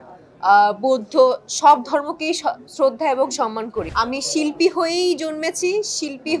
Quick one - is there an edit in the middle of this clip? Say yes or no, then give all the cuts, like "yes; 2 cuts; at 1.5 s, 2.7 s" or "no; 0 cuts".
yes; 1 cut; at 3.9 s